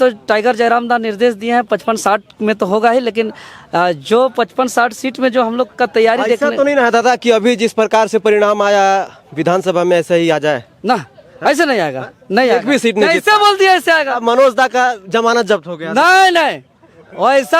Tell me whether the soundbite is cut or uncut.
uncut